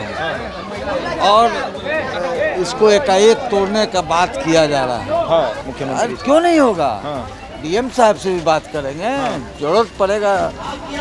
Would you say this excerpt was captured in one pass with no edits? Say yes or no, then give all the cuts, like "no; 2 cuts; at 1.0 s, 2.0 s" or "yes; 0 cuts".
no; 1 cut; at 5.6 s